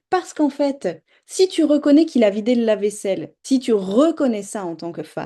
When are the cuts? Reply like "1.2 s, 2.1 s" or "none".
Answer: 3.3 s